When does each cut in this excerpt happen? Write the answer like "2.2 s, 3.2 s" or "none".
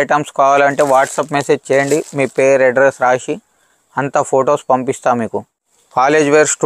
5.5 s